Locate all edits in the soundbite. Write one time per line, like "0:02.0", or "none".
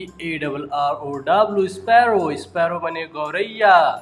none